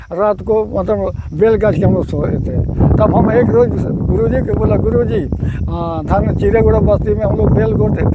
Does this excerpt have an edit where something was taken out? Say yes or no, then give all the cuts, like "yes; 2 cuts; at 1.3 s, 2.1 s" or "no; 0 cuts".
no; 0 cuts